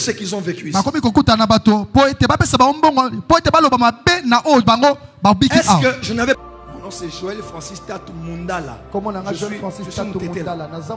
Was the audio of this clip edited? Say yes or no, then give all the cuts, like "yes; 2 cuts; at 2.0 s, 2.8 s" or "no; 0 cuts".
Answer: yes; 1 cut; at 6.4 s